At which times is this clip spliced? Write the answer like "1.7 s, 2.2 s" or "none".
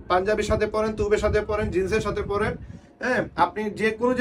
none